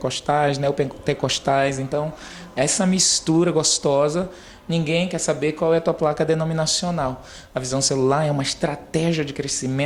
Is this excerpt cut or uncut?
uncut